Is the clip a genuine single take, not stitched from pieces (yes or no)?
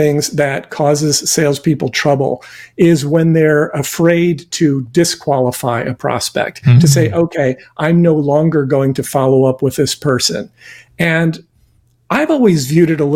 yes